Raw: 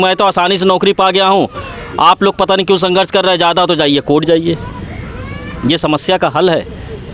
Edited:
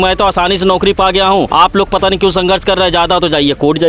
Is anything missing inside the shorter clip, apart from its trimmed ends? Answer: yes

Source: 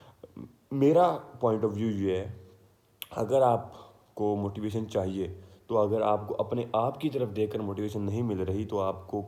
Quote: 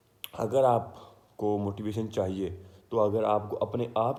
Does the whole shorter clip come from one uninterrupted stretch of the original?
yes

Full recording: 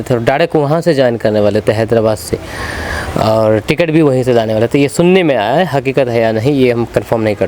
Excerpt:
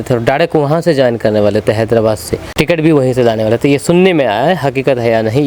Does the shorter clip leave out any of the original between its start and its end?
yes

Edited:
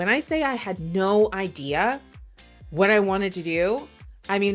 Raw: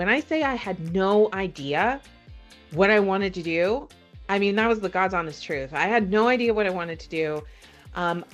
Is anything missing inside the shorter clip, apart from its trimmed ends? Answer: no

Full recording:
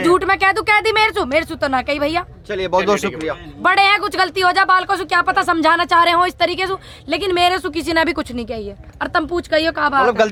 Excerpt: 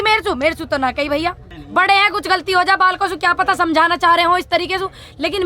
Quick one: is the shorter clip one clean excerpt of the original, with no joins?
no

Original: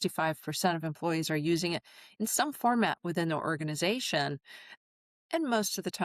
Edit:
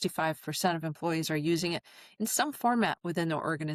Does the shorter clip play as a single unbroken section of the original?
yes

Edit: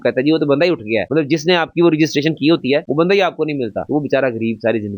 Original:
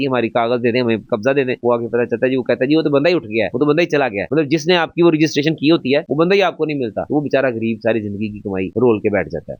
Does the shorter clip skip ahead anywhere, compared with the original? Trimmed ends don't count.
yes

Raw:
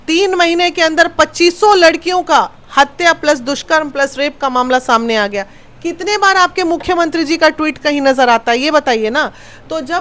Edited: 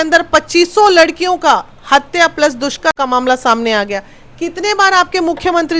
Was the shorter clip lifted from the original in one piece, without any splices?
no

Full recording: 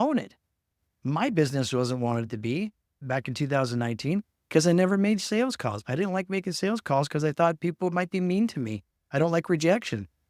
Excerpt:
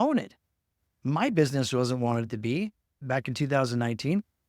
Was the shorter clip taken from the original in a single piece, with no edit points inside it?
yes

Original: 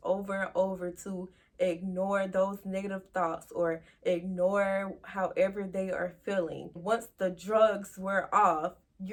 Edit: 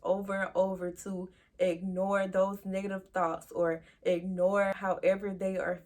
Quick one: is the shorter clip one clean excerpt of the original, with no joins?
no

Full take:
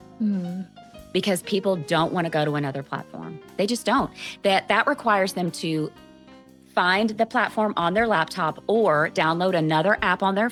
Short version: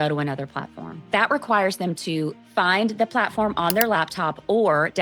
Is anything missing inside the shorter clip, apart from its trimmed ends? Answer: yes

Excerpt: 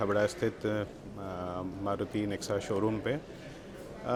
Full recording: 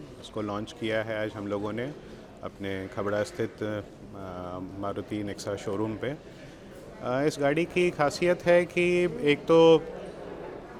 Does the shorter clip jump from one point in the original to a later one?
no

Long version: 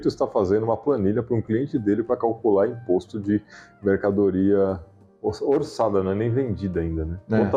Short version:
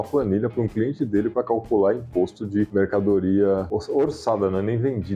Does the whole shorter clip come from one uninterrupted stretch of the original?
no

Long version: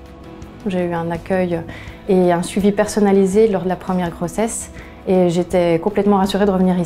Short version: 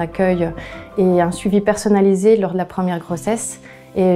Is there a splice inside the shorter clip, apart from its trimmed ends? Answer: no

